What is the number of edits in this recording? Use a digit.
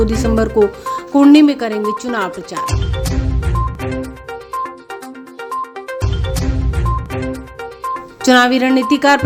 0